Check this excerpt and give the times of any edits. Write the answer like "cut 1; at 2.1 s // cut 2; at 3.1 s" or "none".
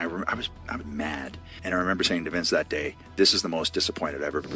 cut 1; at 1.4 s